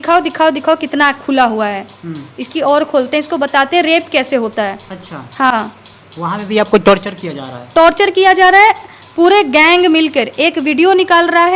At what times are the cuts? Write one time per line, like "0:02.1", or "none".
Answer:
none